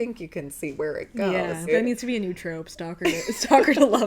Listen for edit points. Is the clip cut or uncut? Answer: cut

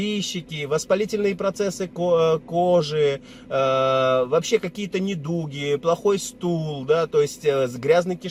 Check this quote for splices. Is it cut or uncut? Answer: uncut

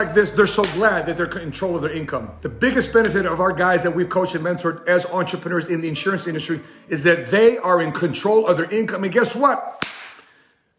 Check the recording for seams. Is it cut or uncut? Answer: uncut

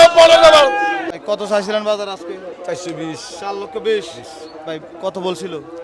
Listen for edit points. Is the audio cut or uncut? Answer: cut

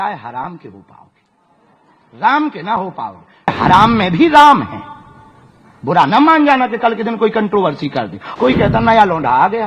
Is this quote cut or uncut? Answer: cut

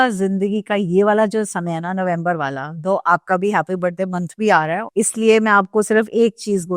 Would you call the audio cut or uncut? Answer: cut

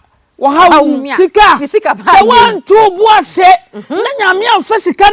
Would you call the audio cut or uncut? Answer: cut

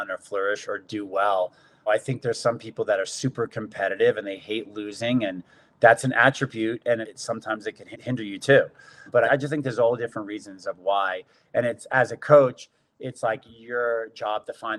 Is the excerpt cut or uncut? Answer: uncut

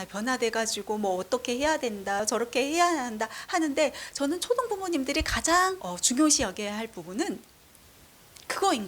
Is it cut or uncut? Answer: cut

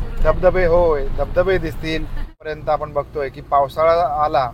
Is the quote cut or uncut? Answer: cut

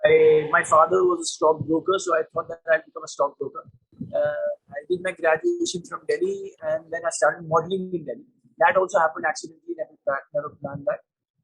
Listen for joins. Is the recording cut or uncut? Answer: uncut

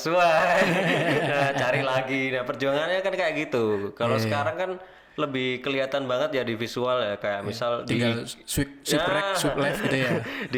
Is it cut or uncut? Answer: uncut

